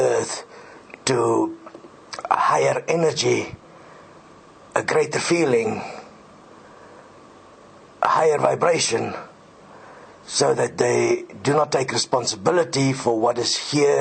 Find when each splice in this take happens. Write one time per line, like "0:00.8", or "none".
0:06.2